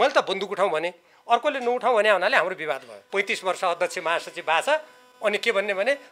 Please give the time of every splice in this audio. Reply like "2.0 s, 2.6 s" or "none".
2.9 s